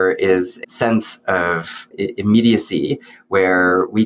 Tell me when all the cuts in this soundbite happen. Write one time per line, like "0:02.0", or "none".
none